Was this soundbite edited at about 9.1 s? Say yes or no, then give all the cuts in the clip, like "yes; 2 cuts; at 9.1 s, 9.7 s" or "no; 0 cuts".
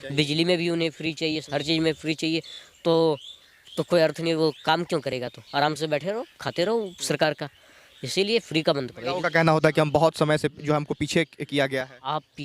yes; 1 cut; at 9.1 s